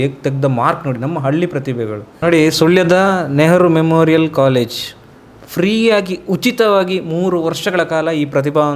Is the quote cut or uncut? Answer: cut